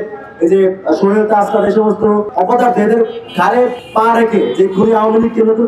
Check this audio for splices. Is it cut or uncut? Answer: cut